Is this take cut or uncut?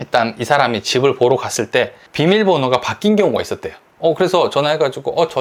uncut